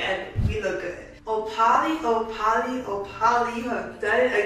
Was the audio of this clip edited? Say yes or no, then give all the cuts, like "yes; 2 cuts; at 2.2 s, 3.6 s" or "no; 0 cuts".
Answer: yes; 1 cut; at 1.3 s